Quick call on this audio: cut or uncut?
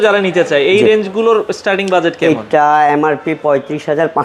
uncut